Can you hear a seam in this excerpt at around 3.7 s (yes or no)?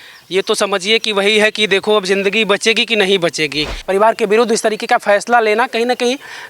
yes